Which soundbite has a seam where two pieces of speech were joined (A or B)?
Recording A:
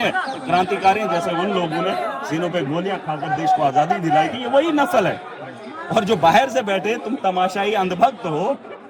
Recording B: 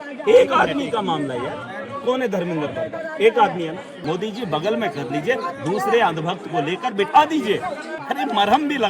B